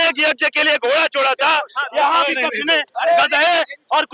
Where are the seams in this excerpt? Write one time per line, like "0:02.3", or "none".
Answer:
none